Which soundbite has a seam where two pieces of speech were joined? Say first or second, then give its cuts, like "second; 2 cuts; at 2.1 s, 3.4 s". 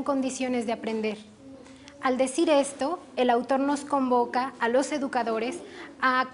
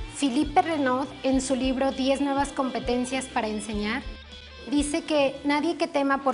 first; 1 cut; at 5.2 s